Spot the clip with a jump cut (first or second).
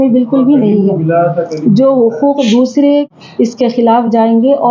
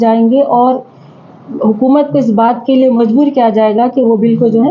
first